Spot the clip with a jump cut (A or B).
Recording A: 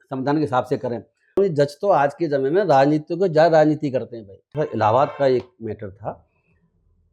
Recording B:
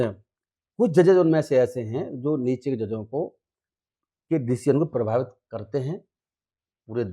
A